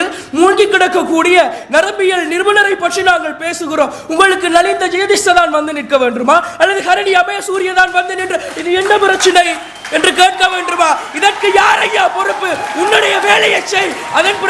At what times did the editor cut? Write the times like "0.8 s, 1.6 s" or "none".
none